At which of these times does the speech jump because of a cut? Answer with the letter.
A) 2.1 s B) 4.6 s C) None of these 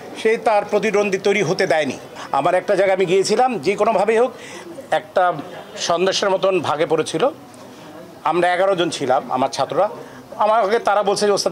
A